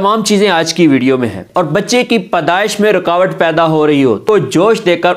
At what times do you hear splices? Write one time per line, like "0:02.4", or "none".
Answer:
0:01.4
0:04.2